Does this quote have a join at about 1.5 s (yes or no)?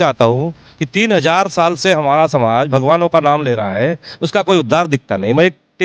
no